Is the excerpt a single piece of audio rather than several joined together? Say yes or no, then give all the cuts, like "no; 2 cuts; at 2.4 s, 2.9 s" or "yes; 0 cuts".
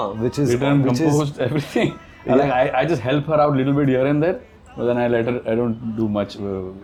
yes; 0 cuts